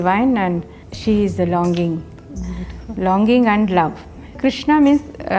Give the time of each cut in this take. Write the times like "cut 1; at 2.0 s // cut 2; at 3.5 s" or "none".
cut 1; at 4.4 s